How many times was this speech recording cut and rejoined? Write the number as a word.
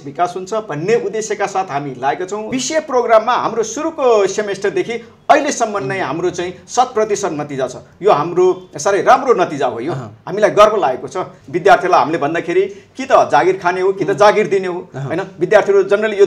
two